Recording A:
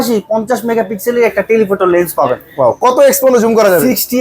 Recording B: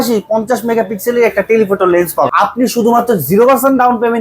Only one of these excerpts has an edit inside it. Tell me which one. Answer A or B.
B